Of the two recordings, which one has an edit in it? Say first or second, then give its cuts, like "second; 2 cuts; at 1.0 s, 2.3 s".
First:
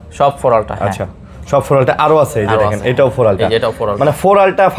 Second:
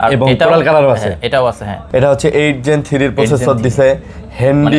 second; 1 cut; at 1.7 s